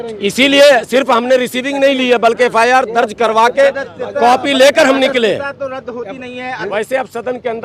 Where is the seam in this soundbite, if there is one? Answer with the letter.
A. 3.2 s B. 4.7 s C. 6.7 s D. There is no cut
C